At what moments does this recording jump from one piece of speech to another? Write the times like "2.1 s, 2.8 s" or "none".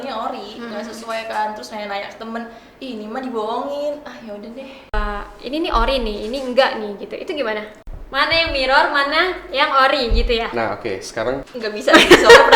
4.9 s, 7.8 s, 11.5 s